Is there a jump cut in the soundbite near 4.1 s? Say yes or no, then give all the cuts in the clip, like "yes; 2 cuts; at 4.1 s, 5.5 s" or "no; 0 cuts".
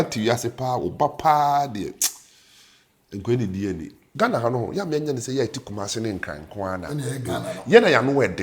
yes; 1 cut; at 4.1 s